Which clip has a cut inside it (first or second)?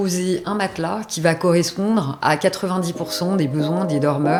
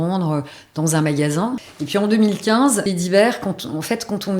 second